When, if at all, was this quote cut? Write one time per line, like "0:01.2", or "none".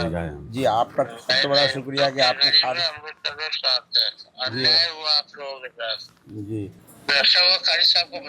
0:06.8